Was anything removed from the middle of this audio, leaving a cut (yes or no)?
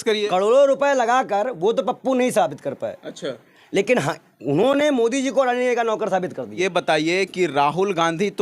yes